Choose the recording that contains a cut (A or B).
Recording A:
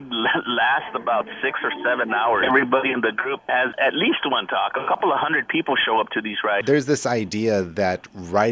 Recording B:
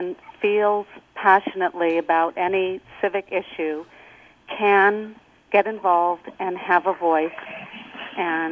A